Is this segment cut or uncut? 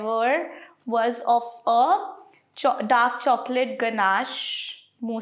uncut